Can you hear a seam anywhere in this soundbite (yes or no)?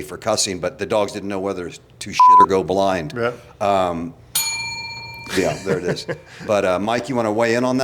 no